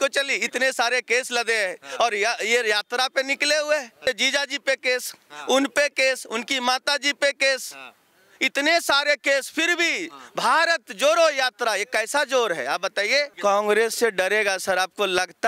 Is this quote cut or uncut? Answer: cut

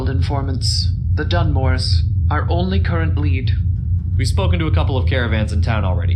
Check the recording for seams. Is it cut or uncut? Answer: uncut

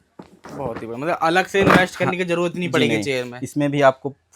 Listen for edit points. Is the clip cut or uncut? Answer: uncut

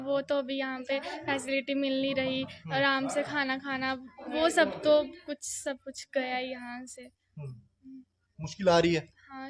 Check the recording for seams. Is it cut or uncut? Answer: uncut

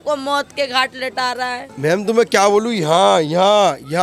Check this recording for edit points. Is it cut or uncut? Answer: cut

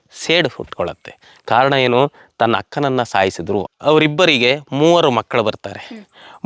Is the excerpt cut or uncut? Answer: cut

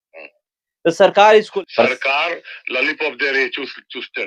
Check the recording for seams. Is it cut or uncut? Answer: cut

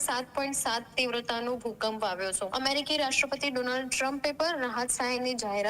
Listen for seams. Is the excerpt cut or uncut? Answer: cut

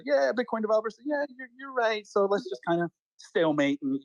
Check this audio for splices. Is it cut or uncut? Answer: uncut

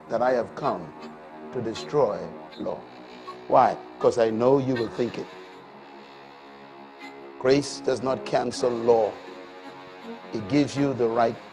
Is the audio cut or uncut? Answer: cut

